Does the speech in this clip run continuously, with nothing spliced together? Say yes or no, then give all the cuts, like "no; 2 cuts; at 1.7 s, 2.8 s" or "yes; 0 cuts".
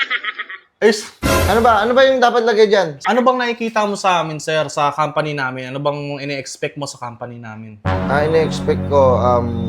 no; 1 cut; at 3.0 s